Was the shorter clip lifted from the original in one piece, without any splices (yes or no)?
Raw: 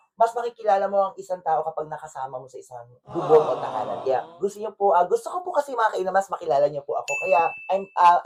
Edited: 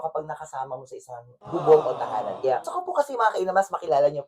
no